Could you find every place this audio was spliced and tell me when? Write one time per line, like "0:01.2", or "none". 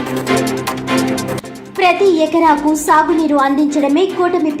0:01.5